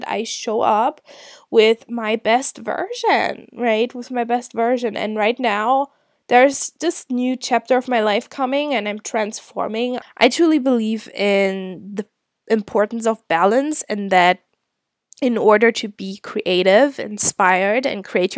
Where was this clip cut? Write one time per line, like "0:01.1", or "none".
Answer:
0:10.1